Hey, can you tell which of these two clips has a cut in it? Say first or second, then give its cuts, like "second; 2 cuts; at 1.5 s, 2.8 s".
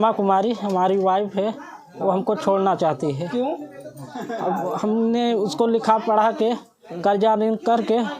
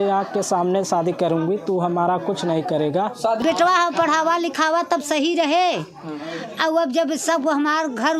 second; 1 cut; at 3.4 s